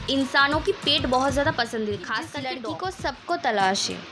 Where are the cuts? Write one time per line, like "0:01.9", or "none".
0:02.4